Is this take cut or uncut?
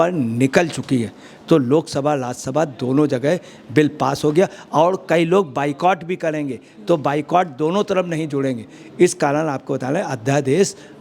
uncut